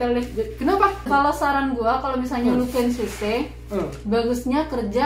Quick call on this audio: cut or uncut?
cut